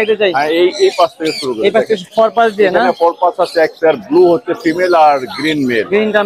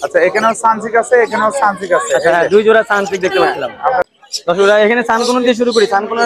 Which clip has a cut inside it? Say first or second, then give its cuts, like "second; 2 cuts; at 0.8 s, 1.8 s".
second; 1 cut; at 4.0 s